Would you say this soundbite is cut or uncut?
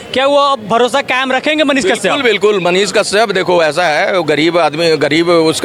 uncut